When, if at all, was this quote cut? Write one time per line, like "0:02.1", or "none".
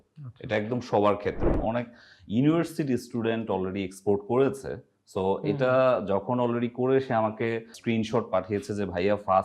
0:01.6